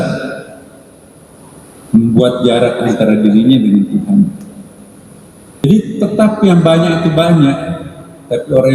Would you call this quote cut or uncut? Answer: cut